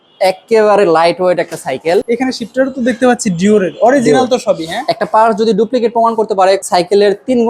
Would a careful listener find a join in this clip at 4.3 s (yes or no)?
no